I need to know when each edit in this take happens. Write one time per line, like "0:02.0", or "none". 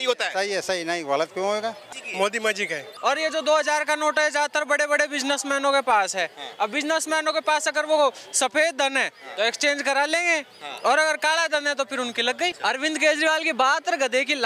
0:01.9
0:02.8
0:12.6